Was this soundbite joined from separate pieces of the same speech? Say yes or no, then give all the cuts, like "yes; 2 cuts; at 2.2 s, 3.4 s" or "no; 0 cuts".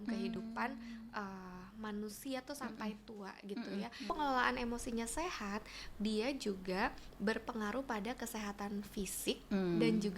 yes; 1 cut; at 4.1 s